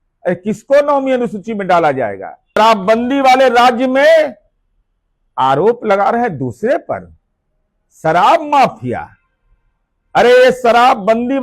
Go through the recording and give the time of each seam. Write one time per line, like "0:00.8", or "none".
0:02.6